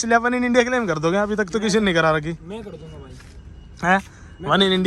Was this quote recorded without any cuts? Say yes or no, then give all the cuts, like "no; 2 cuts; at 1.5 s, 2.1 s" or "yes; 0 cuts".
yes; 0 cuts